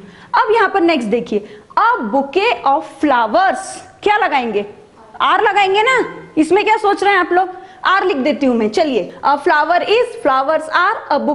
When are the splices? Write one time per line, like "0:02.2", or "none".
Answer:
0:09.1